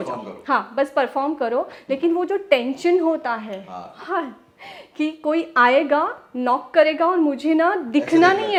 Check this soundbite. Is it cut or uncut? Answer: uncut